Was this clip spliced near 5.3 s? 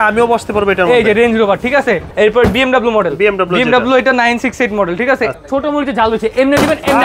yes; 2 cuts; at 2.1 s, 5.3 s

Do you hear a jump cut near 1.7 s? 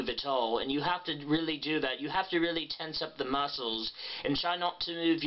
no; 1 cut; at 3.4 s

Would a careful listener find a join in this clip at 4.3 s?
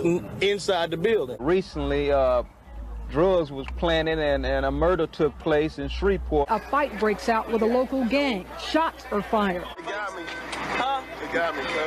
no; 3 cuts; at 1.4 s, 6.4 s, 9.8 s

